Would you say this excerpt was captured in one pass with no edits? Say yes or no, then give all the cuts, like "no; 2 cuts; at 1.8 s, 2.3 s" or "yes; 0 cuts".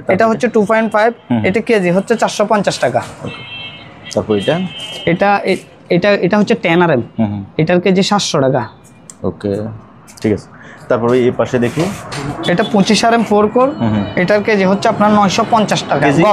yes; 0 cuts